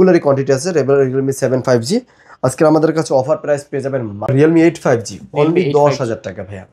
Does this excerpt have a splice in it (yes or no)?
yes